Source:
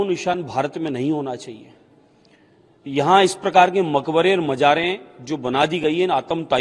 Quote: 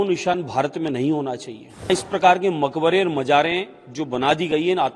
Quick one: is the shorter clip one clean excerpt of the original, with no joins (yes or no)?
no